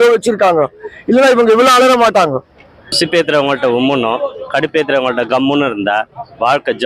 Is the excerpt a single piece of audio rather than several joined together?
no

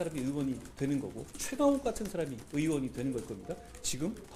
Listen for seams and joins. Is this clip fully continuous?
no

